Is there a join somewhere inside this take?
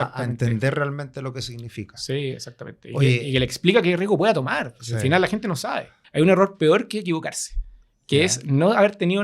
yes; 1 cut; at 6.0 s

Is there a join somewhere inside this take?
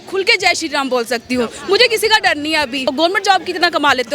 yes; 1 cut; at 2.8 s

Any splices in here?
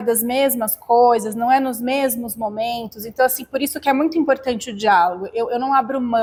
no; 0 cuts

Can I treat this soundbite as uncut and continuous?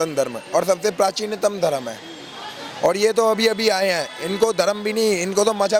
yes; 0 cuts

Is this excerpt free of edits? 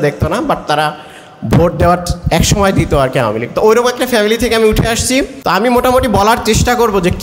no; 1 cut; at 5.3 s

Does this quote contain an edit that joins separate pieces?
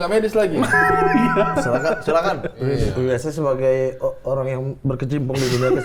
yes; 1 cut; at 2.8 s

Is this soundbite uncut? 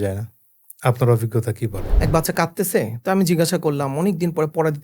no; 1 cut; at 1.8 s

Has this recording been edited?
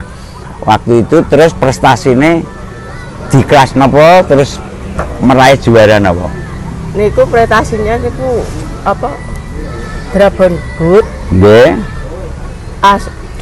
no; 0 cuts

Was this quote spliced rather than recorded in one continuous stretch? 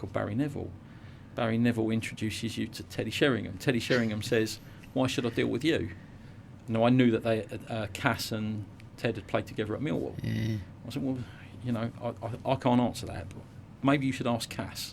no; 0 cuts

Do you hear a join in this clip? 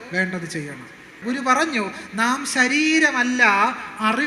yes; 1 cut; at 1.2 s

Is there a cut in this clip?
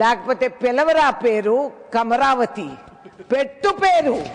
no; 0 cuts

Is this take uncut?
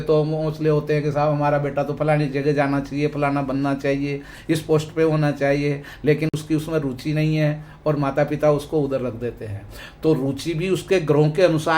yes; 0 cuts

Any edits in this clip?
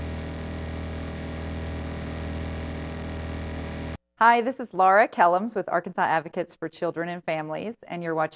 yes; 1 cut; at 4.1 s

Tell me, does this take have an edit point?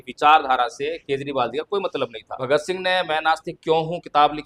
yes; 1 cut; at 2.4 s

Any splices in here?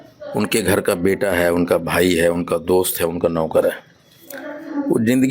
no; 0 cuts

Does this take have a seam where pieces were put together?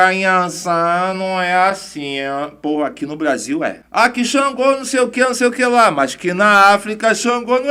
no; 0 cuts

